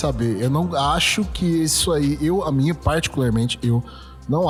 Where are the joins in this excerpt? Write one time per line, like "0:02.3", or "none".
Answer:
none